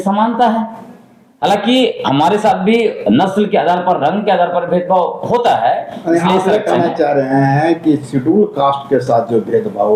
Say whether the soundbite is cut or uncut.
uncut